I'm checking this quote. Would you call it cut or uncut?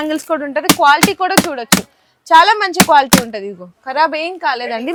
uncut